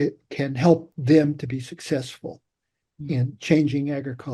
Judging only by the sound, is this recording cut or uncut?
cut